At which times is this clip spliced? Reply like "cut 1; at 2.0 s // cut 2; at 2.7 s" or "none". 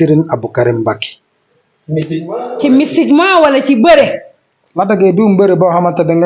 none